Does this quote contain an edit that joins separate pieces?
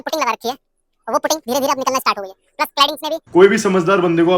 yes; 1 cut; at 3.2 s

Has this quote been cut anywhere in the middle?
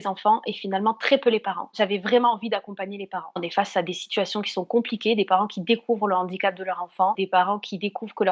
yes; 2 cuts; at 1.7 s, 3.4 s

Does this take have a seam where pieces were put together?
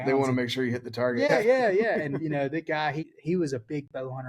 yes; 2 cuts; at 1.3 s, 3.1 s

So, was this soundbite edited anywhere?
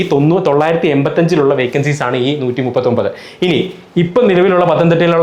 no; 0 cuts

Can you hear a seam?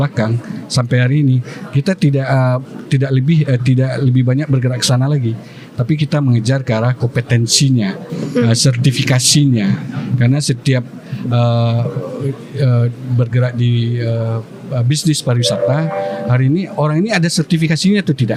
no; 0 cuts

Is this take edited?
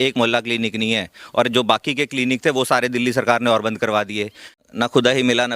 yes; 1 cut; at 4.5 s

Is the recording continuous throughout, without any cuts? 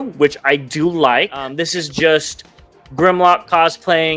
no; 1 cut; at 1.5 s

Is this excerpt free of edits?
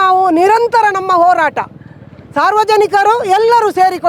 yes; 0 cuts

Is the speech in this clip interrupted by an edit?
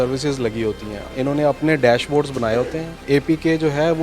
yes; 1 cut; at 0.9 s

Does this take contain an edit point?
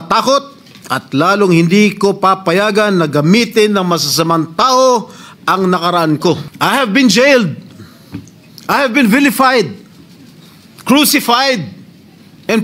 yes; 1 cut; at 6.5 s

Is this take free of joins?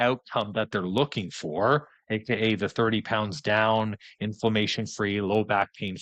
yes; 0 cuts

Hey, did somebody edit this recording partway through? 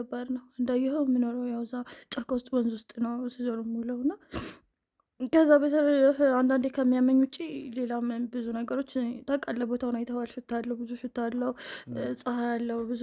no; 0 cuts

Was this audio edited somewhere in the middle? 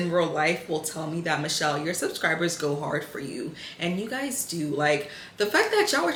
no; 0 cuts

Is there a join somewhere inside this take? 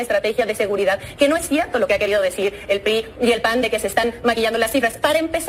no; 0 cuts

